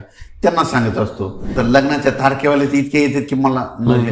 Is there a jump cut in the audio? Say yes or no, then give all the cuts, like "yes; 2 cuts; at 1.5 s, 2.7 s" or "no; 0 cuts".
yes; 1 cut; at 1.6 s